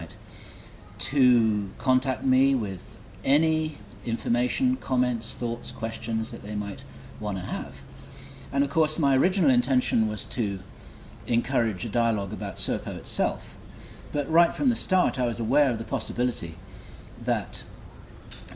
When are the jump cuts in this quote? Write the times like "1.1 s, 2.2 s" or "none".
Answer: 3.4 s

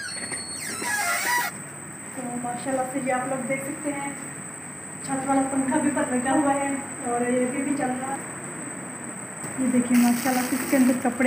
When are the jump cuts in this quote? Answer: 1.5 s, 8.1 s

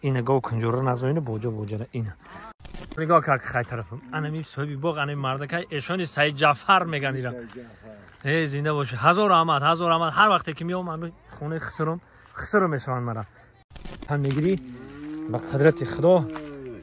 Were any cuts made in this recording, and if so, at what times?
3.0 s, 14.0 s

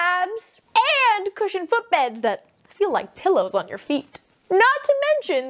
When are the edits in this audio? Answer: none

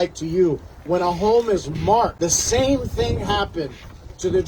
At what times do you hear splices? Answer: 2.1 s

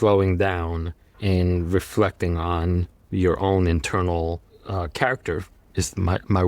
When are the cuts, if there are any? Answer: 1.2 s, 4.5 s

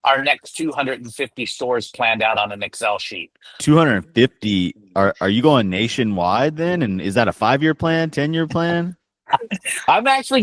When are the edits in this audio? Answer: 3.5 s

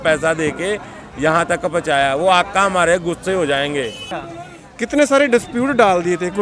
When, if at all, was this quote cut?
4.0 s

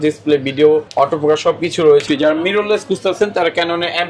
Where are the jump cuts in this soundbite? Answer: 2.0 s

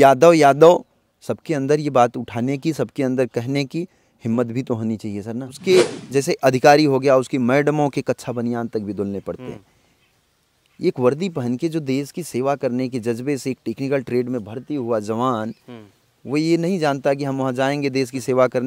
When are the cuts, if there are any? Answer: 5.5 s

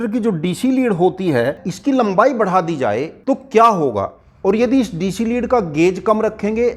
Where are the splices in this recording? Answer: 1.7 s, 3.1 s, 4.2 s

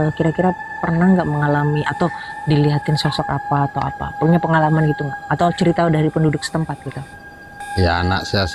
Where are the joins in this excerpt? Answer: 7.6 s

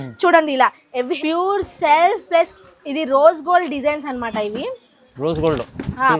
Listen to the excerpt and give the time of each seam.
1.1 s

